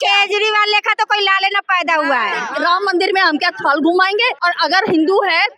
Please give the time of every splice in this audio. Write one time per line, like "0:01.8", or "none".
0:02.5
0:04.3